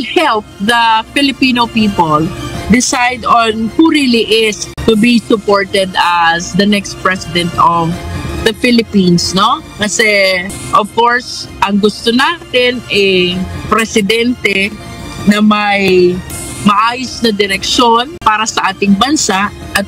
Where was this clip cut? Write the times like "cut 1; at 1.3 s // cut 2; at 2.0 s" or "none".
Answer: cut 1; at 4.7 s // cut 2; at 10.5 s // cut 3; at 18.1 s